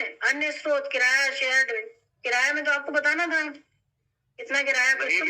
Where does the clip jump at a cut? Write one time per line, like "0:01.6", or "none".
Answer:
none